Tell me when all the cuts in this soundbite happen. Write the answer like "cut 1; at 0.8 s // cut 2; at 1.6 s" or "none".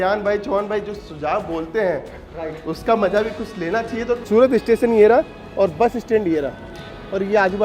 cut 1; at 4.2 s